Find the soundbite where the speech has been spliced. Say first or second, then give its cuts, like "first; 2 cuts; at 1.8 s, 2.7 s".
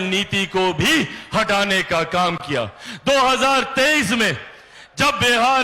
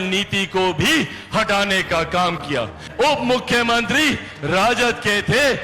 second; 1 cut; at 2.8 s